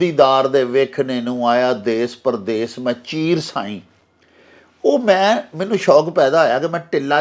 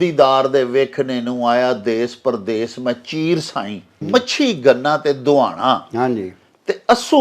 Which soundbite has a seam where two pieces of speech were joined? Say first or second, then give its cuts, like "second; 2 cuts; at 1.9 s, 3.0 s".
second; 1 cut; at 4.0 s